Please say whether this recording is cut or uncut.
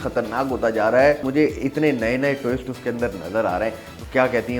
cut